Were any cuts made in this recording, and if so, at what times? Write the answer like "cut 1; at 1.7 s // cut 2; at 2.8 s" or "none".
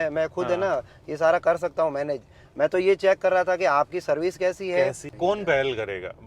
cut 1; at 5.1 s